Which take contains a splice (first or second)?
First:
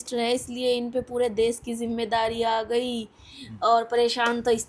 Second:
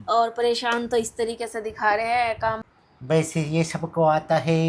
second